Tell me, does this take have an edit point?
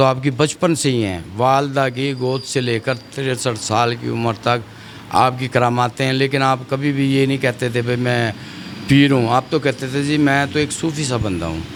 no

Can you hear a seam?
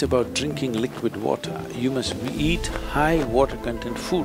no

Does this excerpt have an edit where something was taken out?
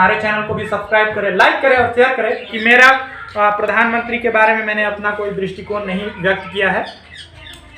yes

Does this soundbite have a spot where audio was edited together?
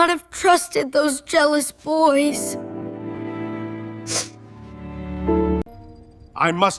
yes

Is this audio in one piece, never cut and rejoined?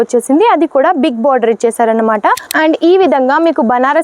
no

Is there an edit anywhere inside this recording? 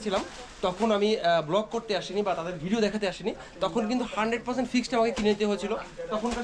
no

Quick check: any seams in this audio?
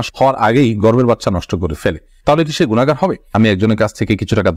yes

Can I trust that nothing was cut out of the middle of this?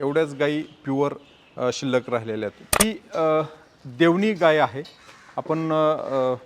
no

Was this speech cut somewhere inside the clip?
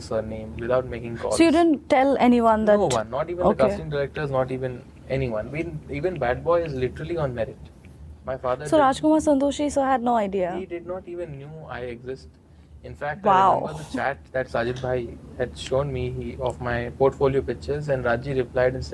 no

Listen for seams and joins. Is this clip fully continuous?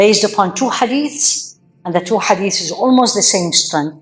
yes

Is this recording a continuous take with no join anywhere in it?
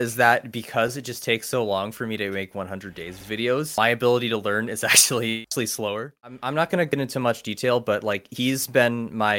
no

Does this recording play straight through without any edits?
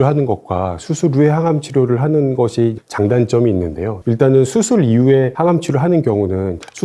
yes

